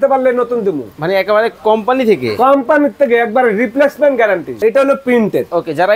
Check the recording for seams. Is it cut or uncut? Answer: cut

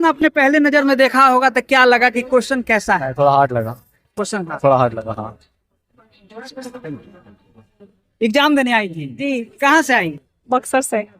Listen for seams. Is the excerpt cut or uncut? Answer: uncut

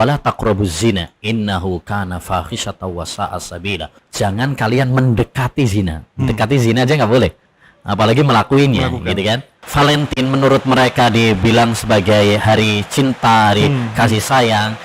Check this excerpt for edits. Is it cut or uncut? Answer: cut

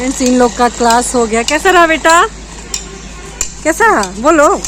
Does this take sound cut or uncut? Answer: uncut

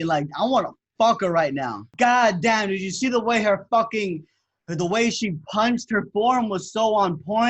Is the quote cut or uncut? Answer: cut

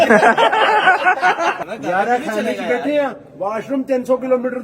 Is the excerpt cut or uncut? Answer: cut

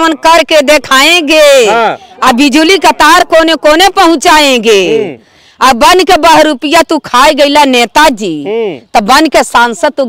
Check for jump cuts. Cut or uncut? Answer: uncut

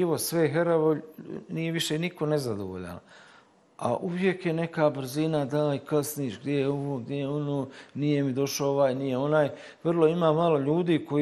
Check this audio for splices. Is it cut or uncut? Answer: uncut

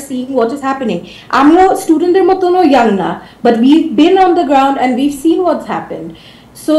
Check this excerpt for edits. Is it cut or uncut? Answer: uncut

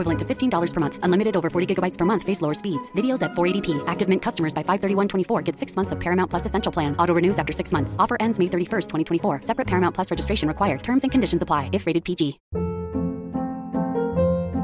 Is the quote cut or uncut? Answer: cut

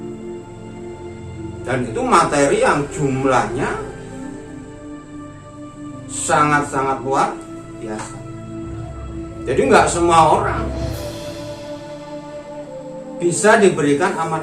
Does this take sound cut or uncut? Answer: cut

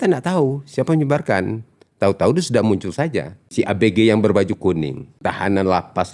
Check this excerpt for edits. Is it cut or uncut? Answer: cut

